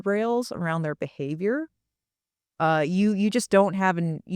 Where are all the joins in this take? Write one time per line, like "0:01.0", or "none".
none